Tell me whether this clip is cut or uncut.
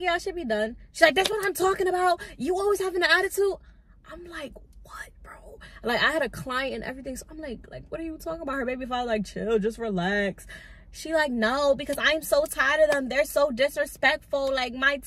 uncut